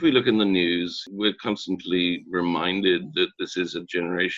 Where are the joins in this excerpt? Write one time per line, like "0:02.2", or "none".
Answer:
0:01.0